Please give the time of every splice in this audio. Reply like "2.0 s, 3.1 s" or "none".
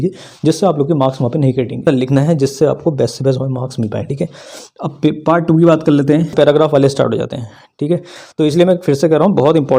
1.8 s, 6.3 s